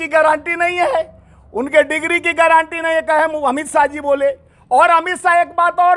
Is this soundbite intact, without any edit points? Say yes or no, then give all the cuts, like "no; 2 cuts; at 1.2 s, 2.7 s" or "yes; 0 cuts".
yes; 0 cuts